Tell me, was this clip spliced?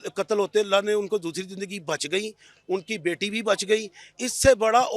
no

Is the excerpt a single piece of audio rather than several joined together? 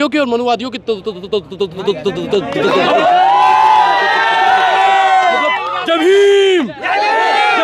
yes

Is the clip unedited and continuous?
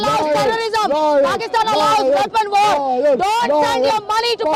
yes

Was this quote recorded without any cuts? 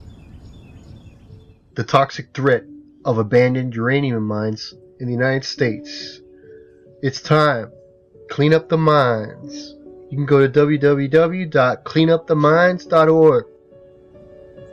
yes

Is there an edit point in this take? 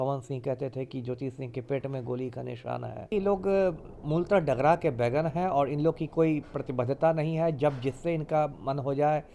yes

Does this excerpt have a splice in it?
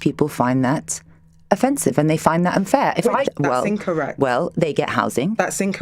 yes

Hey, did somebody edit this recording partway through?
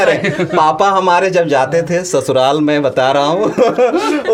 no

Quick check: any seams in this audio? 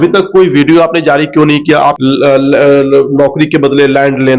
yes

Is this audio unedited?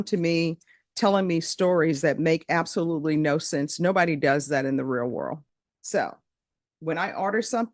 yes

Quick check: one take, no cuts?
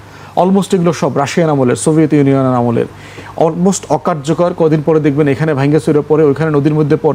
yes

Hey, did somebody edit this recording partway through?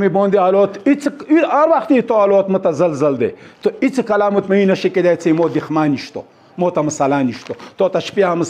no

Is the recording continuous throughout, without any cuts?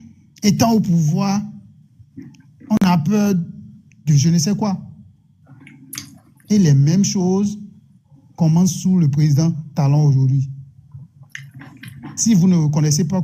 yes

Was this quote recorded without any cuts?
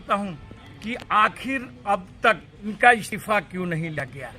no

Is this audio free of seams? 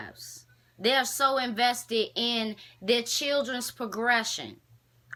yes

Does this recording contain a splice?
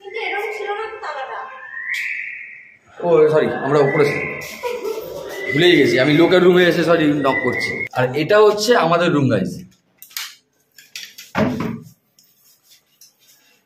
yes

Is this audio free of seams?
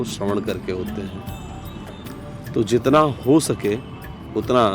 yes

